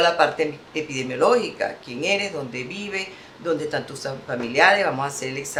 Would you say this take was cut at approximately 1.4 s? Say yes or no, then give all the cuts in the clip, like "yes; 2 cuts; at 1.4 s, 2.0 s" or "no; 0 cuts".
no; 0 cuts